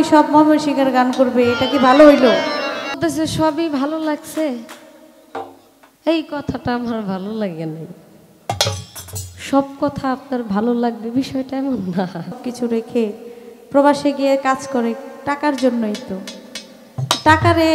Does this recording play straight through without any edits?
no; 2 cuts; at 3.0 s, 12.4 s

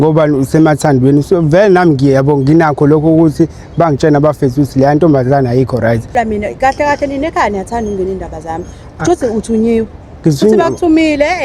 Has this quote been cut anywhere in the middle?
yes; 1 cut; at 6.1 s

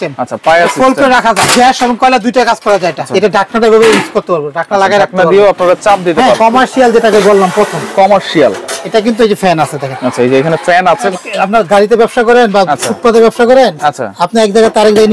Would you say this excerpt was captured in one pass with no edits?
no; 4 cuts; at 1.5 s, 3.0 s, 6.4 s, 11.1 s

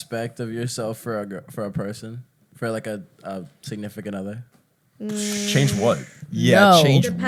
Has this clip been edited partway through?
no; 0 cuts

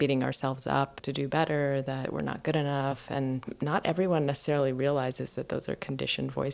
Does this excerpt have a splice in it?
yes; 3 cuts; at 1.0 s, 2.0 s, 3.0 s

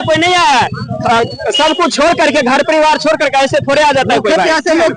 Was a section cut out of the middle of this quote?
no; 0 cuts

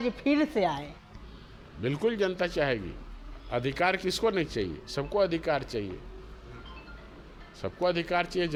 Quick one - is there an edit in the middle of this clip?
no; 0 cuts

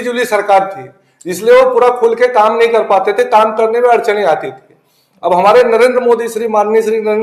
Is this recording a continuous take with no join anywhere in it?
yes; 0 cuts

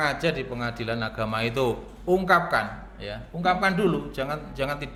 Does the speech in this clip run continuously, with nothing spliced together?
yes; 0 cuts

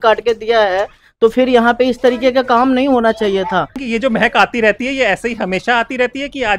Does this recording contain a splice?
yes; 1 cut; at 3.8 s

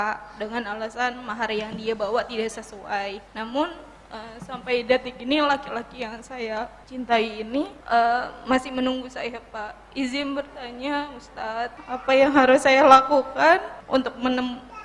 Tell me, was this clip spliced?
yes; 5 cuts; at 3.3 s, 6.8 s, 7.8 s, 11.8 s, 13.7 s

